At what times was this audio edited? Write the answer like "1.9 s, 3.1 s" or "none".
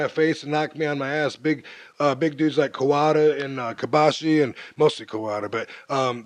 3.4 s